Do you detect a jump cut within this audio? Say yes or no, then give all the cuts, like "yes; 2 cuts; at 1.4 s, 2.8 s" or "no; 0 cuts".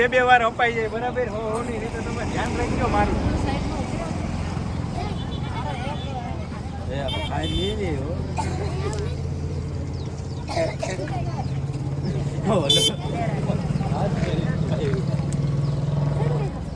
no; 0 cuts